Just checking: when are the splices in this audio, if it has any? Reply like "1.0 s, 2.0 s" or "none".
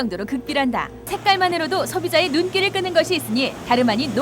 1.1 s